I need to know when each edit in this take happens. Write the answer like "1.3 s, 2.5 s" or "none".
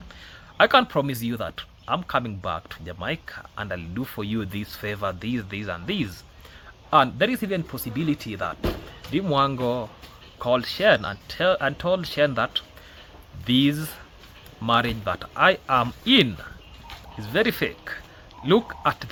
none